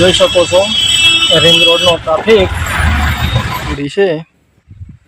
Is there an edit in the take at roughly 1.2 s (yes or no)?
no